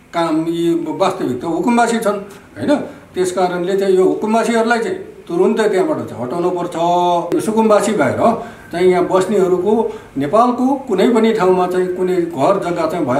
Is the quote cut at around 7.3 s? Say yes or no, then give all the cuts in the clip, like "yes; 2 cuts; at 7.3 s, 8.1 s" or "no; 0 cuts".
yes; 1 cut; at 7.3 s